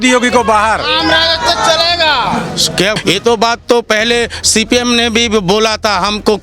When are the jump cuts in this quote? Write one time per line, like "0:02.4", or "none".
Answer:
0:02.9